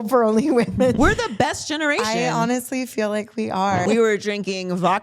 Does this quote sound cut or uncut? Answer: cut